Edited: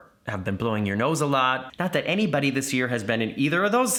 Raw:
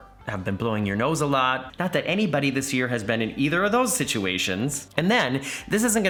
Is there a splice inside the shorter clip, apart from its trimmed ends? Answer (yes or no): no